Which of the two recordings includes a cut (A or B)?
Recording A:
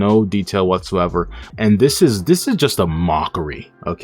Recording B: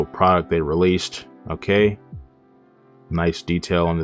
A